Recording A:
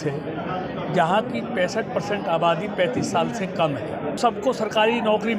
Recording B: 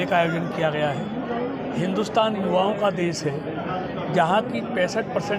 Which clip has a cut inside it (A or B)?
A